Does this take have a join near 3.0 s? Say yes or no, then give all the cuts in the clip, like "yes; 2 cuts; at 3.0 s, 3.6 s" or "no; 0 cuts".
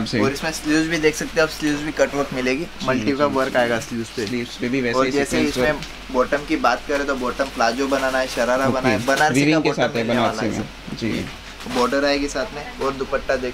no; 0 cuts